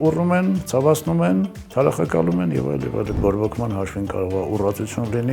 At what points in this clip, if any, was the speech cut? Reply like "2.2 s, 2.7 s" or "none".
3.2 s